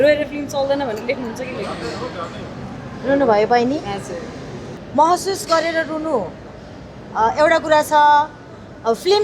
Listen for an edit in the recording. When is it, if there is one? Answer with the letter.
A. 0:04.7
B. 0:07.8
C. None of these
A